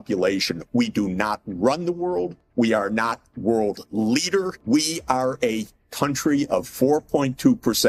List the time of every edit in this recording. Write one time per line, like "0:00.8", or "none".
0:02.4
0:04.6